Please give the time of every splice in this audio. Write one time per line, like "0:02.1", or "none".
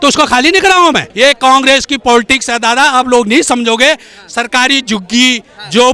0:01.1